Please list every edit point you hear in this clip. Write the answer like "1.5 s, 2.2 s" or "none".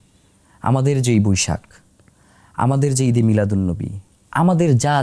none

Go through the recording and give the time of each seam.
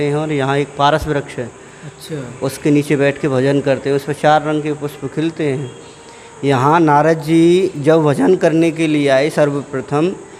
none

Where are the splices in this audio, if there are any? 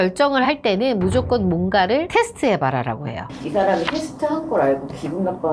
3.3 s

